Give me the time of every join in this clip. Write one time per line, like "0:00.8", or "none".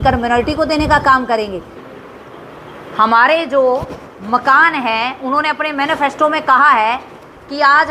0:01.8